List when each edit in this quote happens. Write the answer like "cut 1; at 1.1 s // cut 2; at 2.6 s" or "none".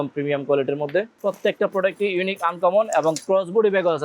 cut 1; at 1.1 s